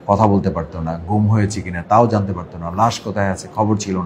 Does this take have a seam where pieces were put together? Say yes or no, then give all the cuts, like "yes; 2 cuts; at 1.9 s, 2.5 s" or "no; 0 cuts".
no; 0 cuts